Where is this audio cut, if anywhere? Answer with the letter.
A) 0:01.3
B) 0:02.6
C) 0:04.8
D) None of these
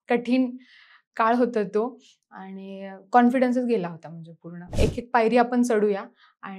C